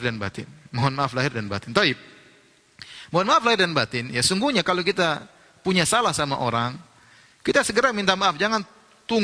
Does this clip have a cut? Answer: no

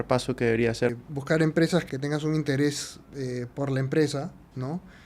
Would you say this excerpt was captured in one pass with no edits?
no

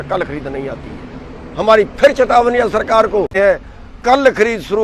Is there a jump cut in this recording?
yes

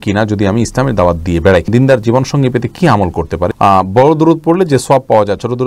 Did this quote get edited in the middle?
yes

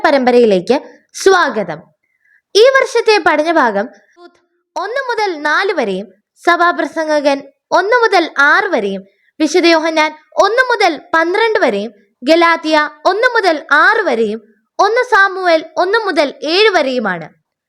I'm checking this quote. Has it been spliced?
yes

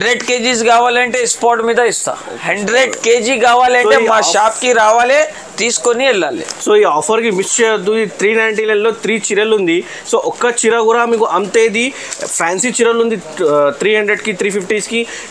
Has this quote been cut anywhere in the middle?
no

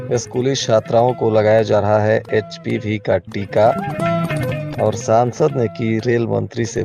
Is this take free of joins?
yes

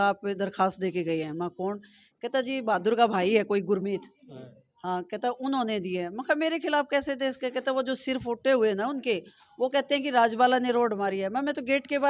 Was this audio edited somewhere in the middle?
no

